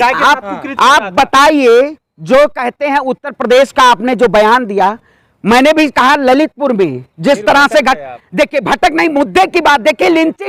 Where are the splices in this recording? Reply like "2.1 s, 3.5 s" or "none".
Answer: none

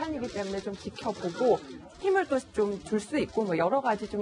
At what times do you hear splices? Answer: none

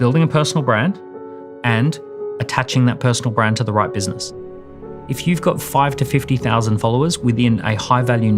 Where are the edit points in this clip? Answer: 4.5 s

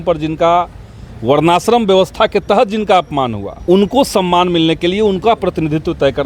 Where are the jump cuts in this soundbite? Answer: 3.5 s

